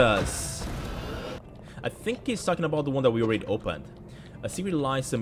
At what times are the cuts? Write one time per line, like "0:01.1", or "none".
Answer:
0:01.5